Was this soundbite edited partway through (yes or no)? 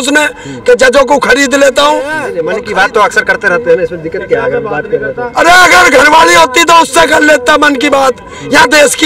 yes